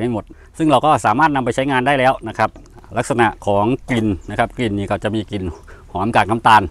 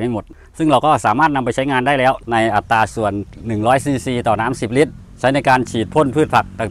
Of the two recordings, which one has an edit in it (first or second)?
second